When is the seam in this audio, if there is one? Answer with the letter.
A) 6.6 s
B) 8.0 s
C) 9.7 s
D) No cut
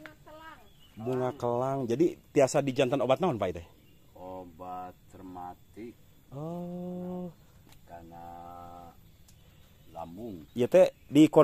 D